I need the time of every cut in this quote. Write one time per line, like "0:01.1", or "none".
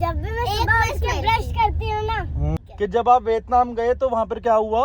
0:02.7